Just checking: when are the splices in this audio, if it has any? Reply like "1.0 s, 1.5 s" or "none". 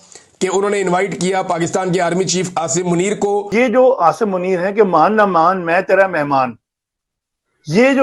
3.7 s